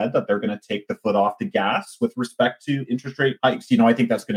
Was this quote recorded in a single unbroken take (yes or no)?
no